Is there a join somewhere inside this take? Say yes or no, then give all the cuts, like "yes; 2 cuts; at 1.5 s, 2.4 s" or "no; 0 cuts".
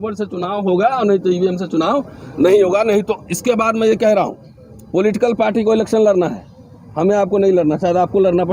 no; 0 cuts